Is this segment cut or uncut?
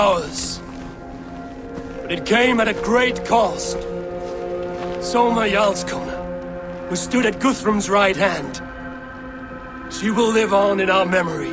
uncut